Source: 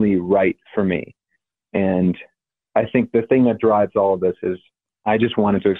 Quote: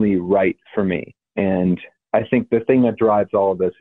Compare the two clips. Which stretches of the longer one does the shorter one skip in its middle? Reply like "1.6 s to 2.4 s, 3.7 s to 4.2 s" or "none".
1.2 s to 1.5 s, 2.3 s to 2.6 s